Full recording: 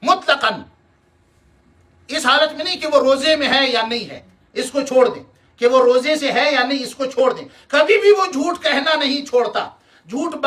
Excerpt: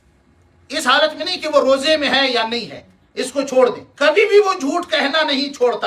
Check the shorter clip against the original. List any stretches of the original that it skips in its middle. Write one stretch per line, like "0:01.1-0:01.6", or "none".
0:05.3-0:07.6